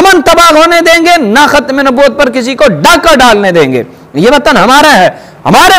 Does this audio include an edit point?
no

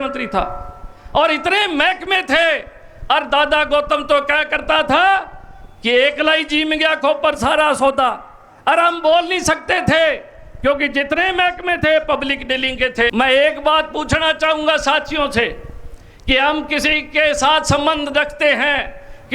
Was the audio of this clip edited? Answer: yes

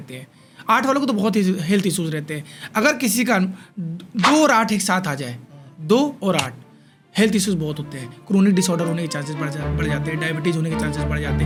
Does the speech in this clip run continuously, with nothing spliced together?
yes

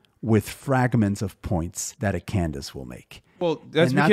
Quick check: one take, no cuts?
no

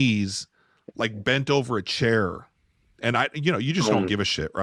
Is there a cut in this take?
no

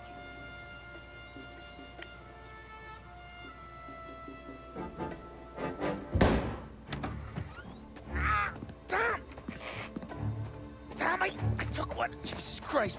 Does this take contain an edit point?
no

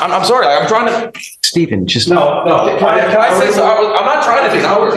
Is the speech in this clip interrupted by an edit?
no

